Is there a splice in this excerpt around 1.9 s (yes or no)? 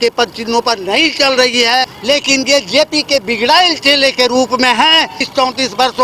yes